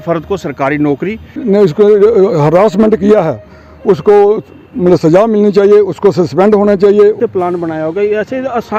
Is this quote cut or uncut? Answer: cut